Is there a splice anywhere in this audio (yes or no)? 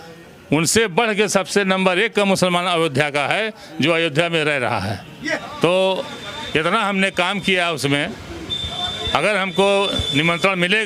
yes